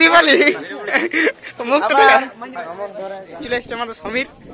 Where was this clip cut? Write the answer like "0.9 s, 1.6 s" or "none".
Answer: 3.4 s